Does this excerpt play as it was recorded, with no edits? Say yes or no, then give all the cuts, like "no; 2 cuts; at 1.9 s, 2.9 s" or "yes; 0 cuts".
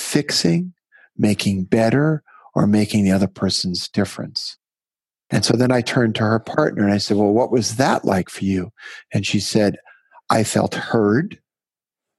yes; 0 cuts